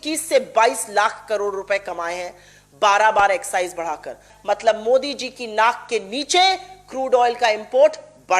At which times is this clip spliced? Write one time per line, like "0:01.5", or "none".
0:04.3

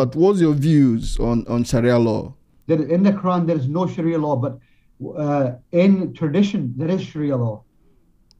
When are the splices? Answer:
0:02.5

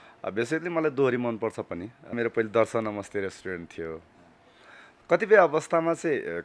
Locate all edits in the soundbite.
0:02.1

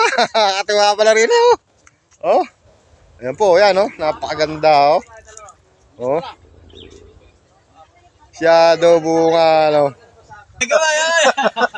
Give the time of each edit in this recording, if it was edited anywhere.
0:10.7

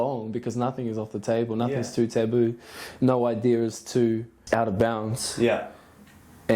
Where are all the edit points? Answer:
0:04.3

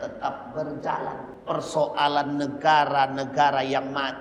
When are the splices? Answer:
0:01.3

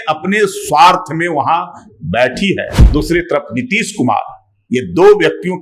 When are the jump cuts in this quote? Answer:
0:02.8

